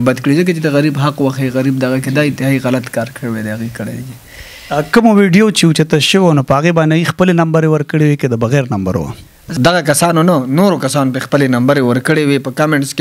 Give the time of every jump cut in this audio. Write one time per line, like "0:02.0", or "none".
0:09.4